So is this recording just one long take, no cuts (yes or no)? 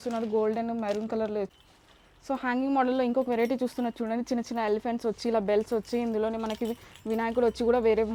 no